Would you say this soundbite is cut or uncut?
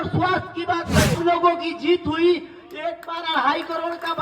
cut